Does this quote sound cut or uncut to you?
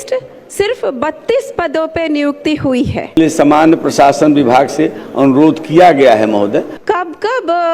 cut